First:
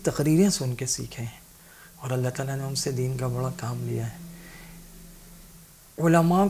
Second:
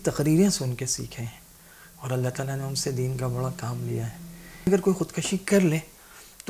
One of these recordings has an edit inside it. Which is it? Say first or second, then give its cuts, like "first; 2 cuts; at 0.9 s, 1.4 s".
second; 1 cut; at 4.7 s